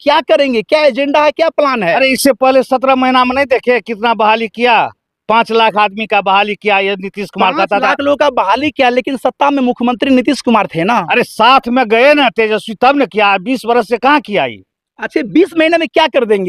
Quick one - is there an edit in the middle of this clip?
no; 0 cuts

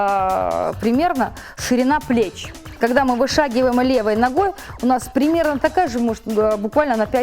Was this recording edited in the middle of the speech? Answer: yes; 1 cut; at 2.8 s

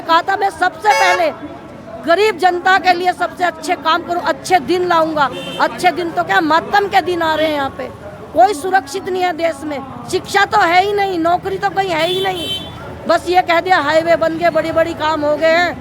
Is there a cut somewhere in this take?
no; 0 cuts

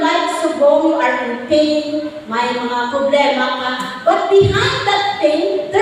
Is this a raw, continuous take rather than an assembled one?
yes; 0 cuts

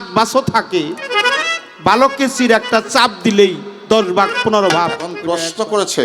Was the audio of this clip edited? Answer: yes; 1 cut; at 5.1 s

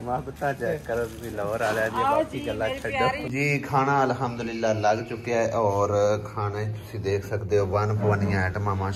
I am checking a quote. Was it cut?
yes; 1 cut; at 3.2 s

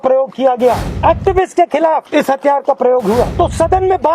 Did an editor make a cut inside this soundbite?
yes; 3 cuts; at 0.9 s, 2.1 s, 3.3 s

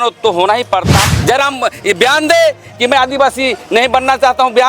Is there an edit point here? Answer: yes; 1 cut; at 0.9 s

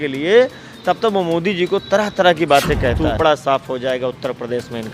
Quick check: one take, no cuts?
no; 1 cut; at 3.1 s

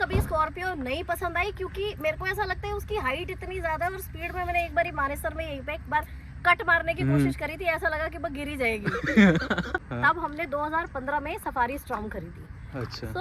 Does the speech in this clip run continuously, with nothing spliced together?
no; 1 cut; at 9.8 s

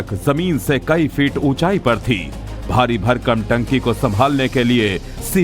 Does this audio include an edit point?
yes; 1 cut; at 3.0 s

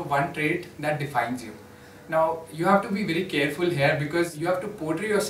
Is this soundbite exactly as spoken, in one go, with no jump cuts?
no; 1 cut; at 4.3 s

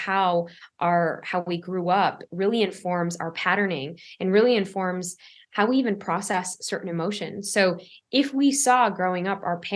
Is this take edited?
no; 0 cuts

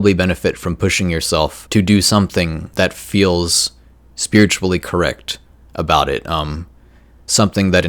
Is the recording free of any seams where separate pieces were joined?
no; 2 cuts; at 1.6 s, 2.6 s

